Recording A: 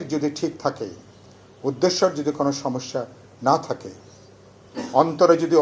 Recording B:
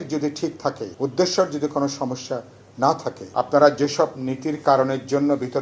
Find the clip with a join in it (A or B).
B